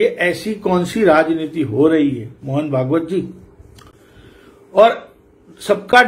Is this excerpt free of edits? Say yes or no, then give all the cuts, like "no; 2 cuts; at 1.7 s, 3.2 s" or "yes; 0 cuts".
yes; 0 cuts